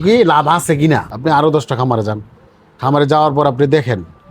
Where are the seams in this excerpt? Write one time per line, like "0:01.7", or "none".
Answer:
0:01.1